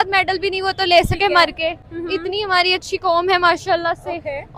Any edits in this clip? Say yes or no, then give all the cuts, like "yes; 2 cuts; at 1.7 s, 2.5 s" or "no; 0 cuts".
no; 0 cuts